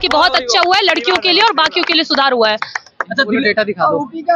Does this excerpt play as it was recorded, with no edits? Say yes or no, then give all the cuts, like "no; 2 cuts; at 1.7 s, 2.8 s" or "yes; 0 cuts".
yes; 0 cuts